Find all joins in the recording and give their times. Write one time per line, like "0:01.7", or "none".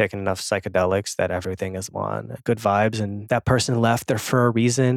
0:02.3
0:03.2